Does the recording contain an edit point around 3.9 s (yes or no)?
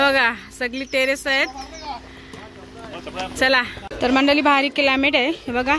yes